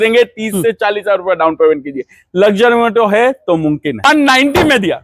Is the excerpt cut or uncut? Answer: cut